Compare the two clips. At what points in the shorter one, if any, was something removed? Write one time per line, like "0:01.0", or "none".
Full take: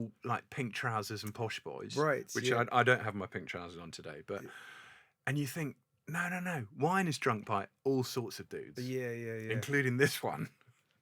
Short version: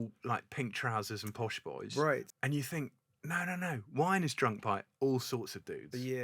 0:02.3